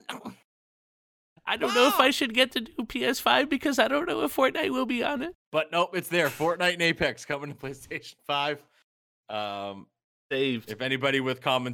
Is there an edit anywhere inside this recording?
yes; 1 cut; at 5.4 s

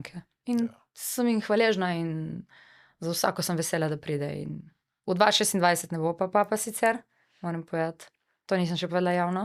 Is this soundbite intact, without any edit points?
yes; 0 cuts

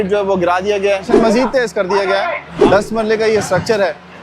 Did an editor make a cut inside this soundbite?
yes; 2 cuts; at 1.1 s, 2.5 s

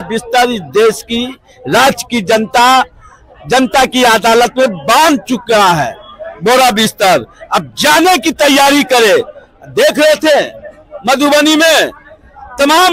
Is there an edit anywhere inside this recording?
no; 0 cuts

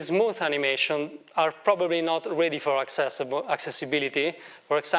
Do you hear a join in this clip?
no; 0 cuts

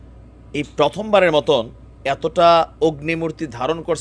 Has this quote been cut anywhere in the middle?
no; 0 cuts

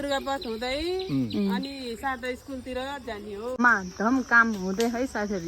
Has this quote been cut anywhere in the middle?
yes; 1 cut; at 3.6 s

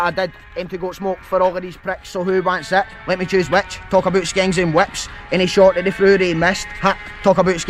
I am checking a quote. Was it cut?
no; 0 cuts

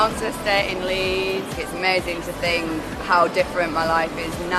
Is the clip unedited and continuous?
no; 1 cut; at 1.5 s

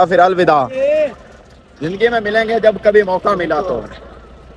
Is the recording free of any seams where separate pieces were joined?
yes; 0 cuts

